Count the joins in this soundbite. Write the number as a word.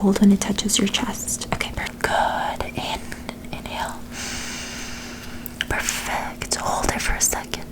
one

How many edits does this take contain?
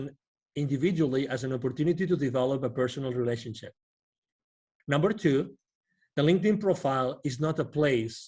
one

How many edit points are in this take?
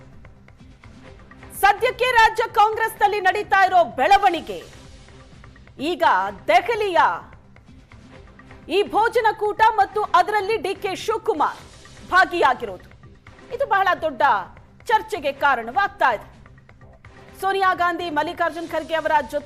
one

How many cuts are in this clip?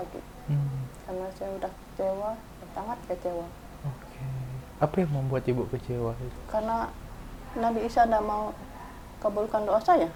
zero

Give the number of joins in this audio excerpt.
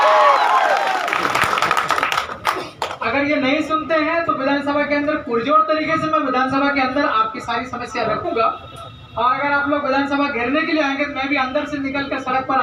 zero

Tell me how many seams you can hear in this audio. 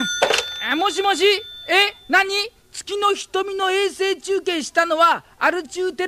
zero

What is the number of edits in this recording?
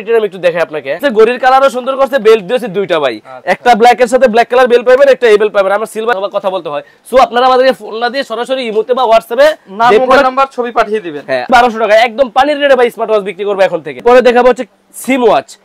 four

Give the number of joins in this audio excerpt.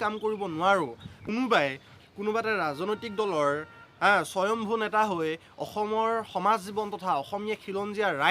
one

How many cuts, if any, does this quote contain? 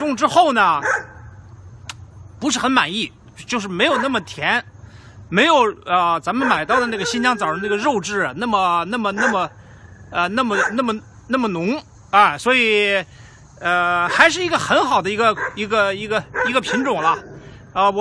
one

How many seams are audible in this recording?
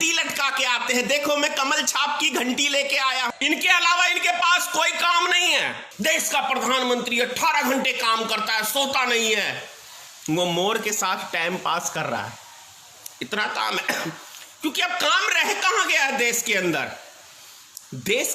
two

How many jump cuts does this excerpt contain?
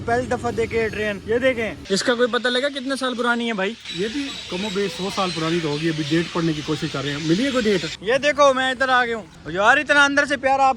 two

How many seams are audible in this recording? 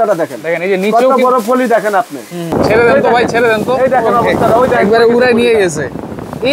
one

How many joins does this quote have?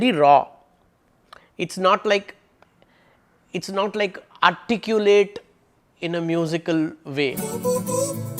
one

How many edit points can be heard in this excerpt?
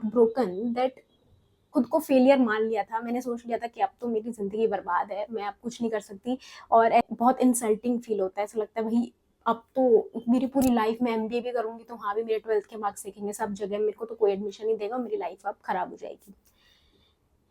two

